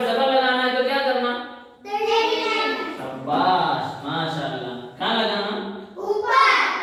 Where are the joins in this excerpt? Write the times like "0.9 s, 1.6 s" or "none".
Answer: none